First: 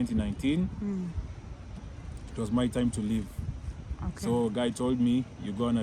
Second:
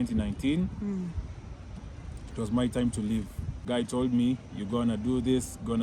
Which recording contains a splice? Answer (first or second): second